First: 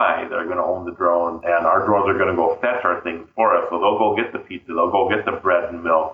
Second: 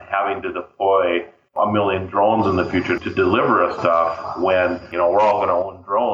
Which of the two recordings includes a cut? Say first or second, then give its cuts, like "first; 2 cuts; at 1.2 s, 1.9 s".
second; 2 cuts; at 2.9 s, 4.9 s